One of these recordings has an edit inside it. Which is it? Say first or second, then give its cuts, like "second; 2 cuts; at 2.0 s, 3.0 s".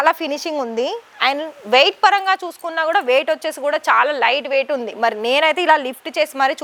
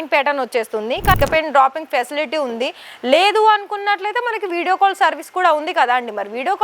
second; 1 cut; at 1.2 s